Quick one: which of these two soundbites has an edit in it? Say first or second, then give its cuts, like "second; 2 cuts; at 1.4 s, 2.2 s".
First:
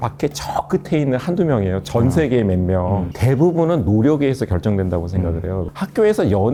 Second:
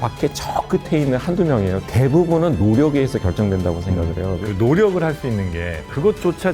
second; 2 cuts; at 1.8 s, 4.4 s